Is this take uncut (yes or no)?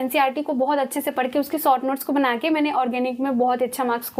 yes